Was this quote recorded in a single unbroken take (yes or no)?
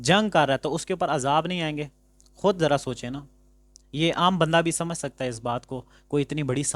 yes